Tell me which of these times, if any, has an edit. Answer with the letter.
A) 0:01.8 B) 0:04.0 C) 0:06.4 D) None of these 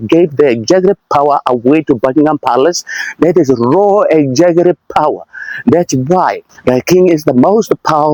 D